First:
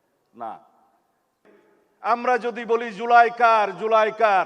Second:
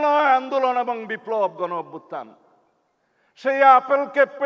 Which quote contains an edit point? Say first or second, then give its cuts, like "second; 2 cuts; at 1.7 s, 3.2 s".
first; 1 cut; at 1.4 s